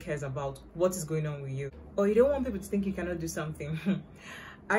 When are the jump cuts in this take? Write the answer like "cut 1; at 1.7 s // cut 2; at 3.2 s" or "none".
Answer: cut 1; at 1.7 s